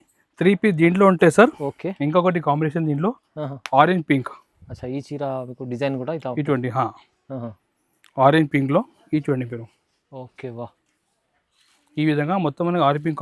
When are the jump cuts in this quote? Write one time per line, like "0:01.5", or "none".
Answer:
none